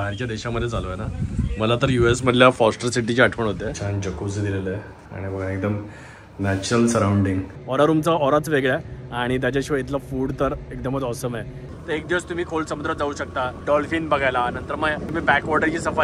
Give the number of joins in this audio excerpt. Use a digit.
4